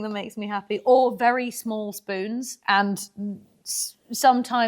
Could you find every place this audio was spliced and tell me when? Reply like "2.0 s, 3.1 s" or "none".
2.5 s